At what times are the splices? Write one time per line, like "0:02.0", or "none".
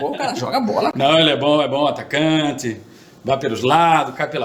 none